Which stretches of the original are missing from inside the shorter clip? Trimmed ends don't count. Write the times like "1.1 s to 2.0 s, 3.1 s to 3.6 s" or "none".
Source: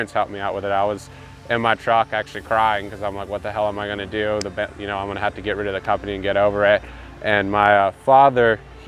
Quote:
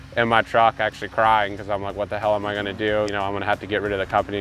4.4 s to 4.8 s